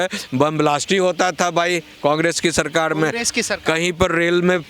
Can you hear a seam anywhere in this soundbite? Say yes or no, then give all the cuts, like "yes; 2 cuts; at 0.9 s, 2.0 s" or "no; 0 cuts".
no; 0 cuts